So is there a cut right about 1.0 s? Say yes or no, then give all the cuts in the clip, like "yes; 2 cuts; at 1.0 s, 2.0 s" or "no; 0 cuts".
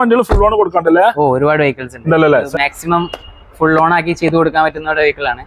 no; 1 cut; at 2.5 s